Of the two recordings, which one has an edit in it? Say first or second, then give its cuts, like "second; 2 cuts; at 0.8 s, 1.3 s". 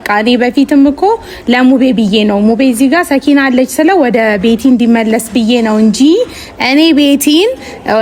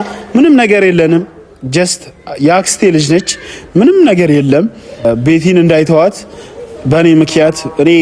second; 1 cut; at 5.1 s